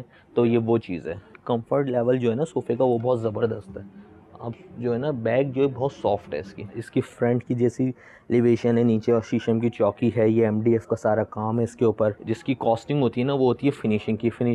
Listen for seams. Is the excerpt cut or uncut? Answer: cut